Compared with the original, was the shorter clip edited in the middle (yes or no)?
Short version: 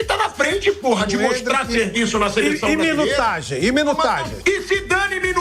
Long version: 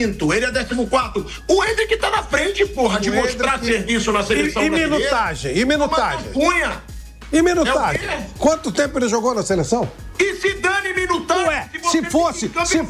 yes